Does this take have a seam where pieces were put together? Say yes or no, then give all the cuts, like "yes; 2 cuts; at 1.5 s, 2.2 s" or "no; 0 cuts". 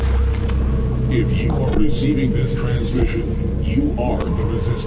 no; 0 cuts